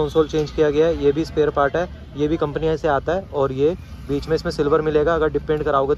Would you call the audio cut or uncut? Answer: uncut